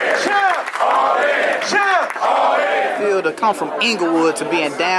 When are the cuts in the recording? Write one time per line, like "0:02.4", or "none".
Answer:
0:03.0

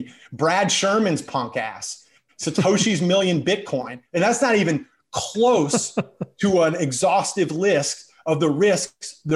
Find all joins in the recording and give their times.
0:04.0

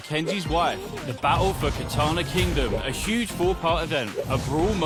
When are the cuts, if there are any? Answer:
none

